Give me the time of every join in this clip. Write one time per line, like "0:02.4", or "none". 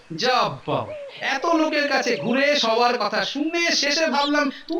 none